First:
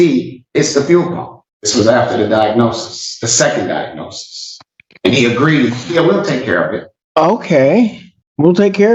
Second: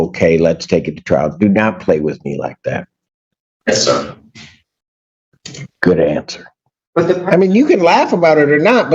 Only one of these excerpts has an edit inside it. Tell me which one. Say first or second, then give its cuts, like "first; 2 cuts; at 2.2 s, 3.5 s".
second; 1 cut; at 6.8 s